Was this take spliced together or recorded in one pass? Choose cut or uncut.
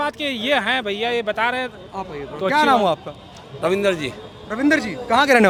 uncut